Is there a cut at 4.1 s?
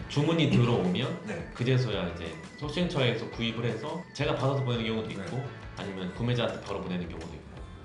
no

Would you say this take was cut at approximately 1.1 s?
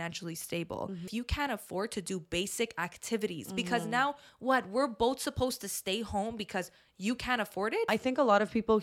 yes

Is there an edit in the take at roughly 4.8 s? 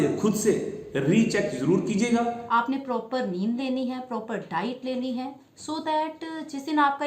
no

